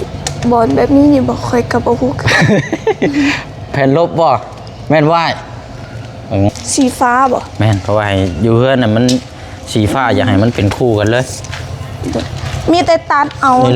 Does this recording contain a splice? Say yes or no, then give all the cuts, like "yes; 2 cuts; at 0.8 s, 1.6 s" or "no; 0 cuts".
yes; 1 cut; at 6.5 s